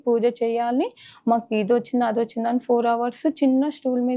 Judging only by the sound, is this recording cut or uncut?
uncut